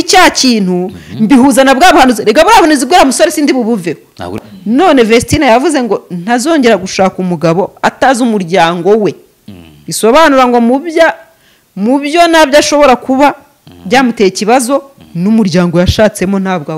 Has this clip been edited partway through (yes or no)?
yes